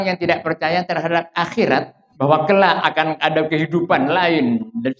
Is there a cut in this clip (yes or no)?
yes